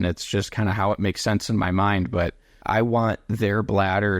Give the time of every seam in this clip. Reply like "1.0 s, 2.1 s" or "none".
2.5 s

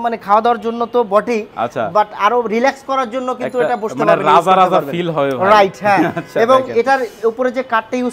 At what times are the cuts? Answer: none

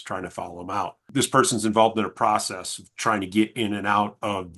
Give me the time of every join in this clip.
1.1 s

